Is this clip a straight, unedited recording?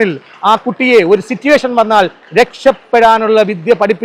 yes; 0 cuts

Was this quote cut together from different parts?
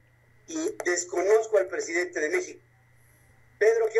no; 0 cuts

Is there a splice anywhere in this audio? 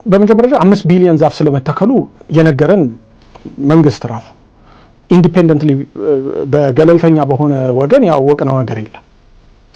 no; 0 cuts

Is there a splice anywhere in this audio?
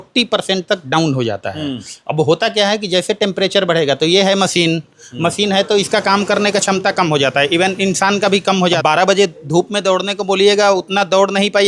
yes; 1 cut; at 8.8 s

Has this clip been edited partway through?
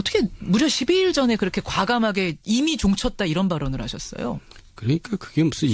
yes; 1 cut; at 4.1 s

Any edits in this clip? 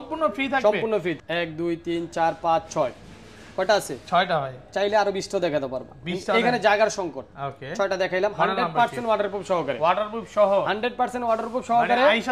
yes; 1 cut; at 1.2 s

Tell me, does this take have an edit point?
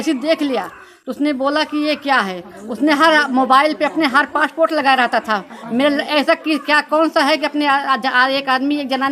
no; 0 cuts

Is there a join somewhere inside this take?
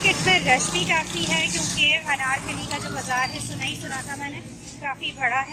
no; 0 cuts

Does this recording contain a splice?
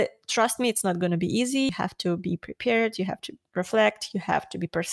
yes; 1 cut; at 1.7 s

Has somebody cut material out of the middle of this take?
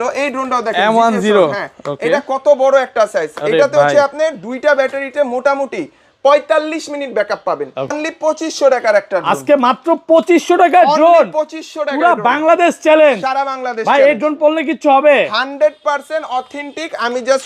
yes; 1 cut; at 7.9 s

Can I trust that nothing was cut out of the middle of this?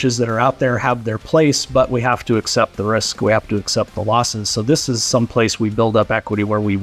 yes; 0 cuts

